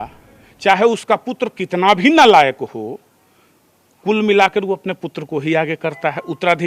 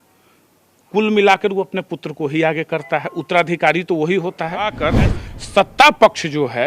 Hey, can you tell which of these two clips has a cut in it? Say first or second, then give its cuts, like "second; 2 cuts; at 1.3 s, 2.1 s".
second; 1 cut; at 4.8 s